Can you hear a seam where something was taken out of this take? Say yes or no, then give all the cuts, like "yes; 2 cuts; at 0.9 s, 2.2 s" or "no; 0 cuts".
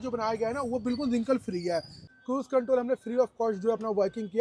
yes; 1 cut; at 2.0 s